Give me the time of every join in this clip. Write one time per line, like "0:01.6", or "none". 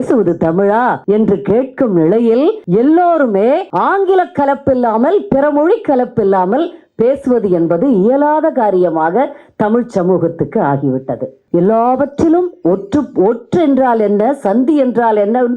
0:01.0
0:02.6
0:03.7
0:11.3